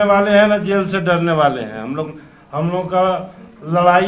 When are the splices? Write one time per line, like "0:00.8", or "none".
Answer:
none